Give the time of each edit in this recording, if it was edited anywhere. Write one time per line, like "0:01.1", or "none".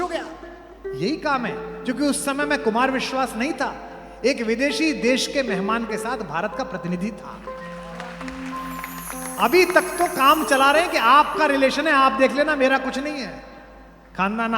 0:09.1